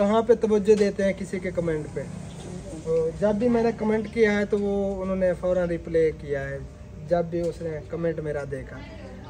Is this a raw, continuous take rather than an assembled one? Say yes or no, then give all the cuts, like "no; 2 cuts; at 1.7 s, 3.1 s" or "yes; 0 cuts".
yes; 0 cuts